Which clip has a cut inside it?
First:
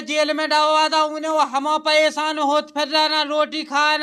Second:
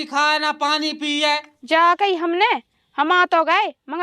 second; 1 cut; at 1.5 s

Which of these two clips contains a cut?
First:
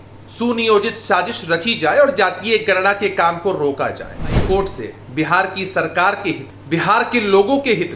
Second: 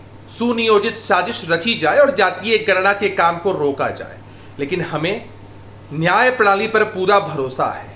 first; 2 cuts; at 4.4 s, 6.5 s

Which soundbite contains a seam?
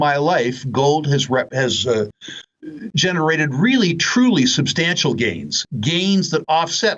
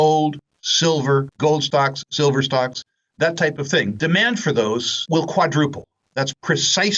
second; 3 cuts; at 1.3 s, 4.0 s, 4.9 s

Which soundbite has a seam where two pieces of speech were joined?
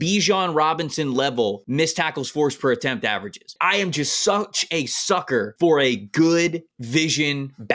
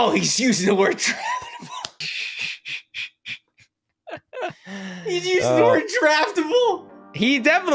first; 4 cuts; at 1.6 s, 3.5 s, 5.5 s, 6.8 s

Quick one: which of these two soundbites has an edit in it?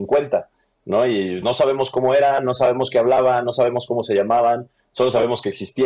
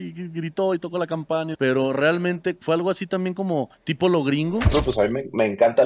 second; 4 cuts; at 1.5 s, 2.6 s, 3.8 s, 4.7 s

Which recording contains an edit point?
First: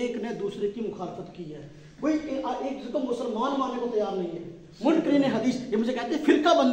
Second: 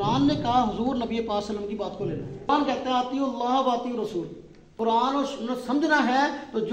second; 2 cuts; at 2.5 s, 4.7 s

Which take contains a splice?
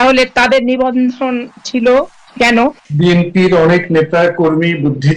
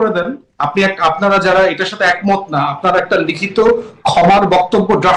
first; 1 cut; at 2.8 s

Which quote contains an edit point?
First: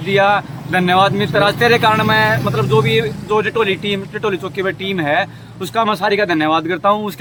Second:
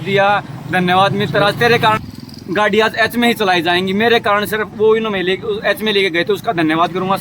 second; 1 cut; at 2.0 s

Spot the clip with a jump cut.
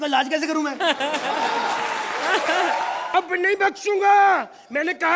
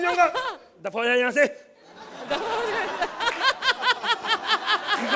first; 1 cut; at 3.0 s

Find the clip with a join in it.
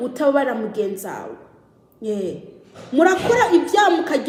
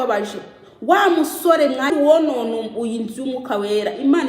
second; 1 cut; at 1.9 s

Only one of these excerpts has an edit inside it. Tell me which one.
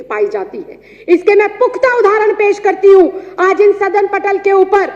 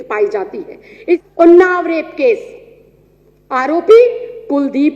second; 1 cut; at 1.2 s

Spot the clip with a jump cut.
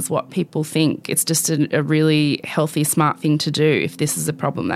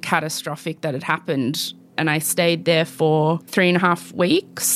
second; 2 cuts; at 1.9 s, 3.4 s

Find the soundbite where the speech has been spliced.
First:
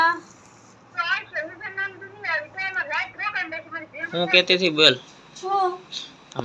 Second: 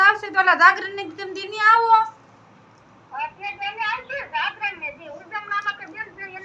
first; 1 cut; at 4.1 s

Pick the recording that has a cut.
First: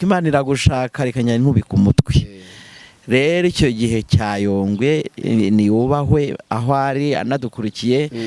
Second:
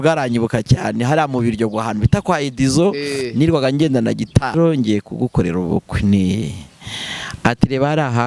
second; 1 cut; at 4.5 s

